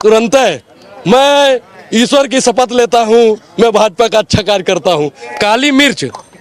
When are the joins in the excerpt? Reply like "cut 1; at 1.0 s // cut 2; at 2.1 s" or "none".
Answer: cut 1; at 5.2 s